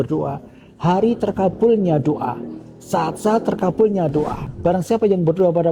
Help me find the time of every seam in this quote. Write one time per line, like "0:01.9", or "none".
0:04.4